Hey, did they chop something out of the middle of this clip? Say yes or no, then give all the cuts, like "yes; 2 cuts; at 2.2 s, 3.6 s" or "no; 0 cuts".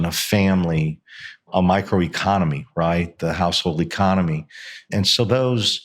yes; 2 cuts; at 1.5 s, 4.9 s